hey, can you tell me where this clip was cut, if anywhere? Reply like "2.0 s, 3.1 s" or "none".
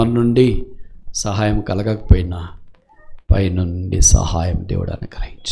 none